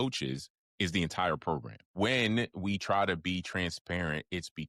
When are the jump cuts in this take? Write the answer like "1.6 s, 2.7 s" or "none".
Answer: 1.8 s